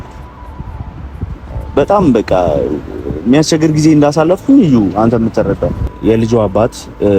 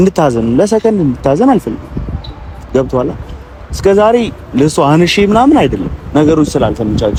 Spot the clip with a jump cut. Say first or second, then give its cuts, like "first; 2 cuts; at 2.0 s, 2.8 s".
first; 1 cut; at 5.9 s